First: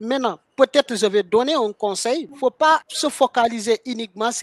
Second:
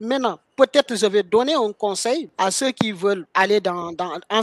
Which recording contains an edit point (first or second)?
first